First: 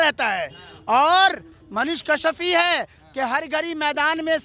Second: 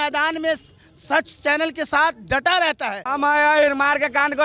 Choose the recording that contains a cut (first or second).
second